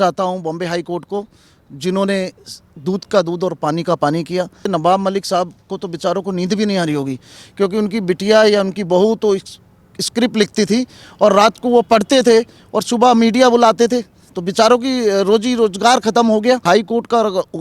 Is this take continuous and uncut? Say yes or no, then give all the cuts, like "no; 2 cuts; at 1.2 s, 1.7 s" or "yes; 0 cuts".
no; 2 cuts; at 4.7 s, 16.6 s